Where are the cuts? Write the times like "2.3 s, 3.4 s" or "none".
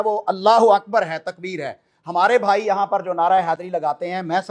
none